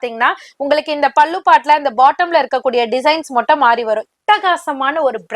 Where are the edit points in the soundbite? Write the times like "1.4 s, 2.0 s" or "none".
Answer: 4.1 s